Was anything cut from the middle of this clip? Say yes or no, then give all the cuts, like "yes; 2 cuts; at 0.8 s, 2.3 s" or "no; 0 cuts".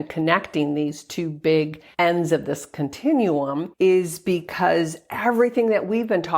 yes; 2 cuts; at 1.8 s, 3.7 s